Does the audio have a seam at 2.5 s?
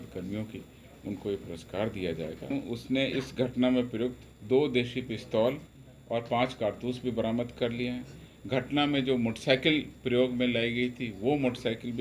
yes; 1 cut; at 2.5 s

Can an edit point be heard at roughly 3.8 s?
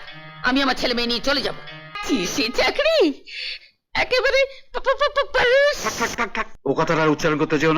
no; 2 cuts; at 1.9 s, 6.4 s

